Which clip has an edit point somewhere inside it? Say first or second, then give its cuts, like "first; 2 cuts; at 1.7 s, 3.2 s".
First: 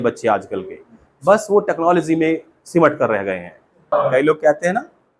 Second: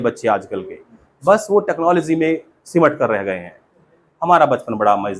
first; 1 cut; at 3.9 s